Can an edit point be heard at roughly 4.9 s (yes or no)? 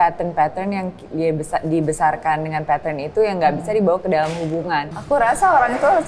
yes